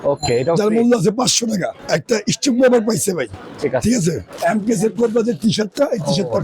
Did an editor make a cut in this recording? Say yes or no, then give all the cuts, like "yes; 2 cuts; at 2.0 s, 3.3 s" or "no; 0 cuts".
yes; 2 cuts; at 1.8 s, 4.3 s